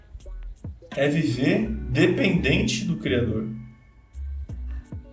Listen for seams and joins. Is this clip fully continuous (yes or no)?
no